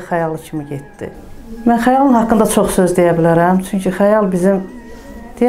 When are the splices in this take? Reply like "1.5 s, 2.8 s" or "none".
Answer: none